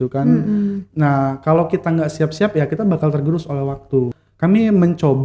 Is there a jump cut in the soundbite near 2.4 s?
no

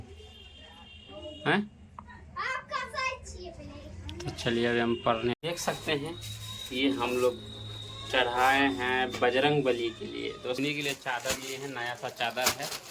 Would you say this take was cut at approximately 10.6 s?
yes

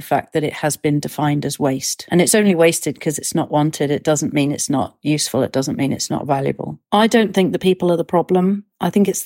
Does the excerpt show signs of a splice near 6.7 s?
yes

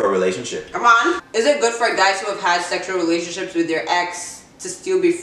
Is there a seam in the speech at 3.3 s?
no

